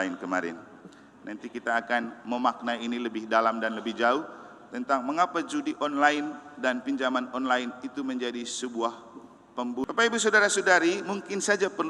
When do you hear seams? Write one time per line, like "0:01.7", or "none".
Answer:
0:09.8